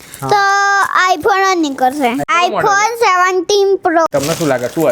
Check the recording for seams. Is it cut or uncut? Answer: cut